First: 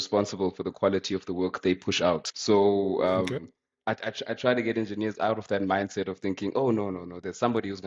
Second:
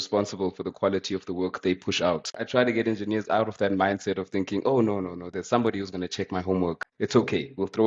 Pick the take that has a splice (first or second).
second